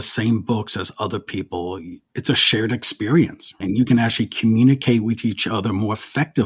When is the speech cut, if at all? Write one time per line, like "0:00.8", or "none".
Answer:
0:02.0